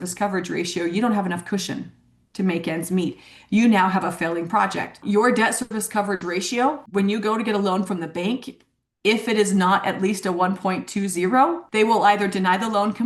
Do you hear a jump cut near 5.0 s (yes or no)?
yes